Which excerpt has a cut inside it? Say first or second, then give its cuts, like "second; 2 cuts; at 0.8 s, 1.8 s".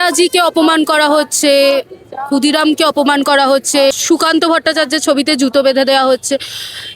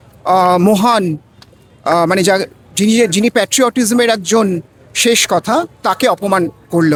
first; 1 cut; at 4.0 s